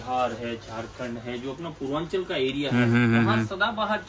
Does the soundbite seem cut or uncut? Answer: uncut